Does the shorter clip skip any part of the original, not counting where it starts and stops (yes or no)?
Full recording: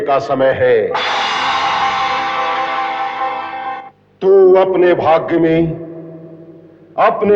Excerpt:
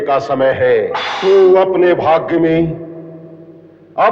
yes